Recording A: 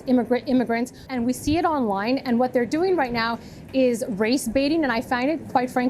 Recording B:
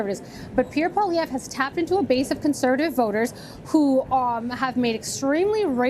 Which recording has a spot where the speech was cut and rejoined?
A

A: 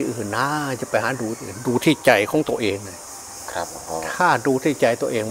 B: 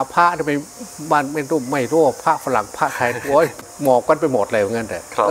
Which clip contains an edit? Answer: B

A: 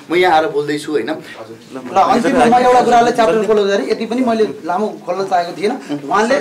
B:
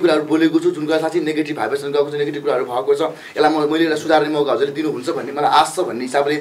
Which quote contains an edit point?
A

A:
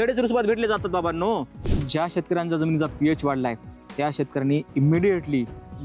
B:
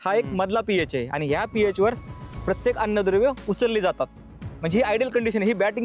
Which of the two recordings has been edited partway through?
A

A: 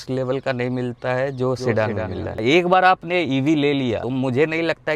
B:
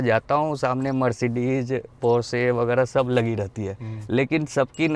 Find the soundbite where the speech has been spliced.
A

